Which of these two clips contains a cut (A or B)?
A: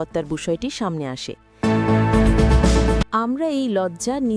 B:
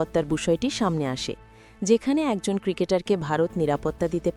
A